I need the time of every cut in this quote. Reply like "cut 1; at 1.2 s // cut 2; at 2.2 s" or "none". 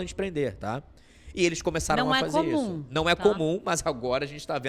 none

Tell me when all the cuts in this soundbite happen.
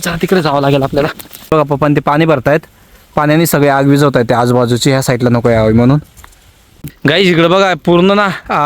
cut 1; at 1.5 s // cut 2; at 6.9 s

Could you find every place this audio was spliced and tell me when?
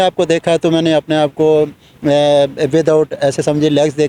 none

